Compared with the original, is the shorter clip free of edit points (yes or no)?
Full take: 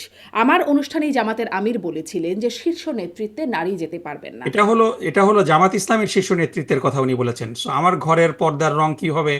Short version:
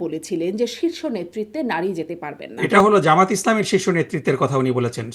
no